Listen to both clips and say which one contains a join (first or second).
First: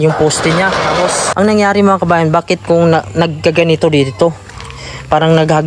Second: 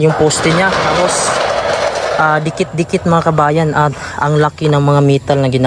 first